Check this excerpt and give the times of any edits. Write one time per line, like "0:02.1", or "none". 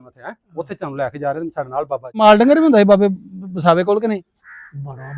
0:02.2